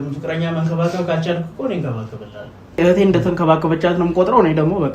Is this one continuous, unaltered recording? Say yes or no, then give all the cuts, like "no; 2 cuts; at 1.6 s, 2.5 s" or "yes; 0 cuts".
no; 1 cut; at 2.8 s